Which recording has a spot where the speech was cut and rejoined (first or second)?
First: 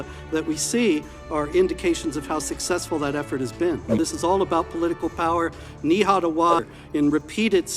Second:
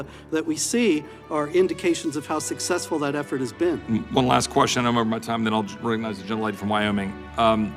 first